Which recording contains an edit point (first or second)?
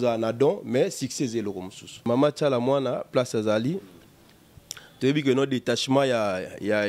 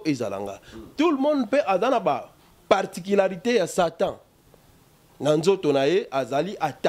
first